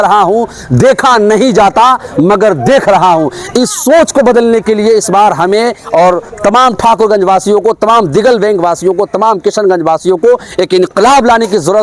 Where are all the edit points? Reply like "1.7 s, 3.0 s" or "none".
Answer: none